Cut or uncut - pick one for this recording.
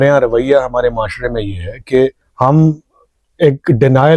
cut